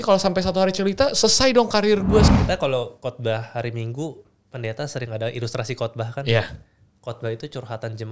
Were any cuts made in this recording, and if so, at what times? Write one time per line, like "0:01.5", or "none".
0:02.3